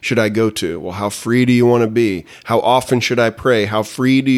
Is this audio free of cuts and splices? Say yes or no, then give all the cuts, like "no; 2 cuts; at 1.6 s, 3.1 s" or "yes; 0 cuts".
yes; 0 cuts